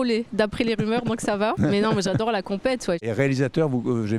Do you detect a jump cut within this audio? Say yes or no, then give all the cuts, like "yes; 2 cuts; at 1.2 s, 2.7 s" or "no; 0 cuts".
yes; 2 cuts; at 1.6 s, 3.0 s